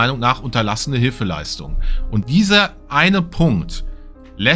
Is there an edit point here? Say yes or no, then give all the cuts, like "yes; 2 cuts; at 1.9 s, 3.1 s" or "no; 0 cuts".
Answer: yes; 1 cut; at 2.2 s